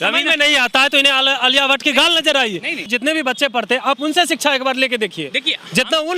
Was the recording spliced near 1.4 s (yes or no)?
no